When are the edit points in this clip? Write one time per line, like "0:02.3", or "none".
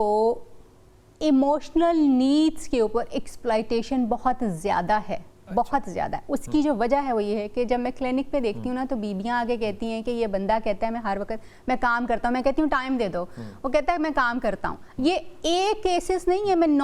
none